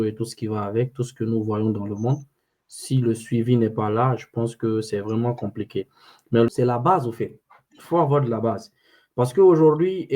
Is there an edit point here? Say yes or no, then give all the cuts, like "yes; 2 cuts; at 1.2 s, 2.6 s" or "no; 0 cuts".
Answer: yes; 1 cut; at 6.5 s